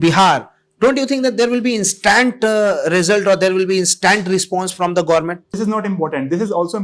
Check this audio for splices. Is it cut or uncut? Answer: cut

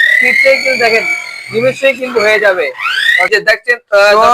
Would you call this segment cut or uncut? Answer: cut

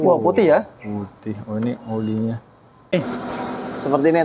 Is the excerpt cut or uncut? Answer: cut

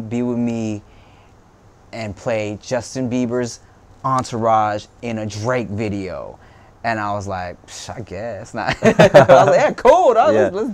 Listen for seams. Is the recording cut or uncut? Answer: uncut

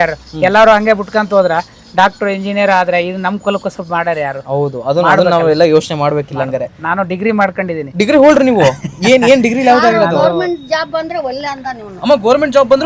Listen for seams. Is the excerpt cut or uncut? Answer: uncut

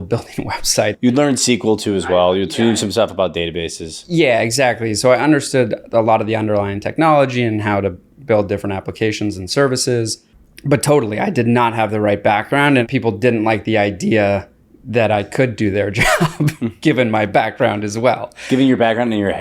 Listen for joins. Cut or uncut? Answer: cut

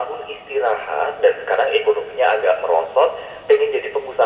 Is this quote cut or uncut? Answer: uncut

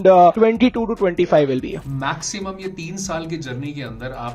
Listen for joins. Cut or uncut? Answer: cut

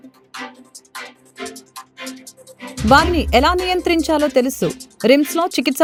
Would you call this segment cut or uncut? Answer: uncut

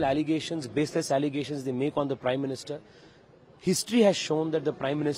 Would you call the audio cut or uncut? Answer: uncut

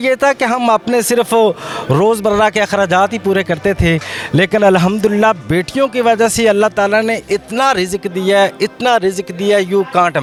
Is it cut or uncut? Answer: uncut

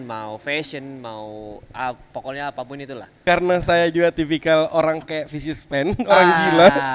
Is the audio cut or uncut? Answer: cut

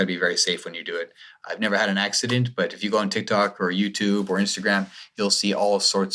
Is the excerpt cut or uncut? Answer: uncut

